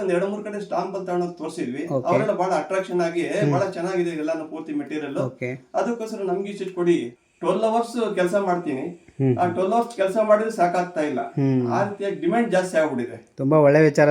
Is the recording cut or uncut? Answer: cut